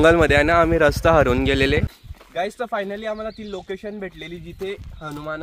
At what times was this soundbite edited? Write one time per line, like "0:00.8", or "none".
0:02.0